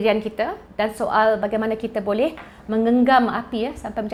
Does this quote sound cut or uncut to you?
uncut